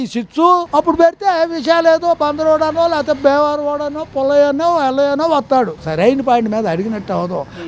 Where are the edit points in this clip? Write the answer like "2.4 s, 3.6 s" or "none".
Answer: 5.8 s